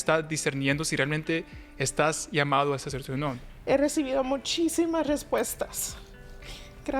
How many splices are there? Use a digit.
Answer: 1